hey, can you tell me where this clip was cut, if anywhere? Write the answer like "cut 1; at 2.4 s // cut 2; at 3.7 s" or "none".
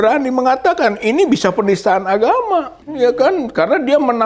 cut 1; at 2.8 s